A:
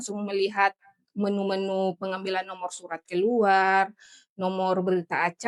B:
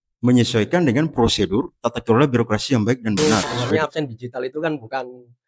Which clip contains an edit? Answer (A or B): B